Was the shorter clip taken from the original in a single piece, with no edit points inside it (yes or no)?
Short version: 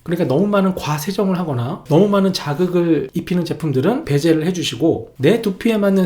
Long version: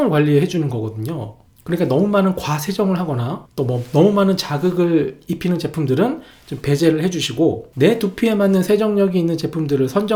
no